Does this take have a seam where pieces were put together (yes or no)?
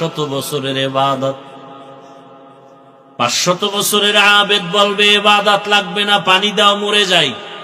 no